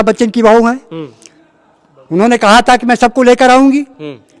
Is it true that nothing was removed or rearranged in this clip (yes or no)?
yes